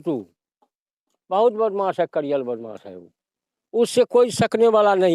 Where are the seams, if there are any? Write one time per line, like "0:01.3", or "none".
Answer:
none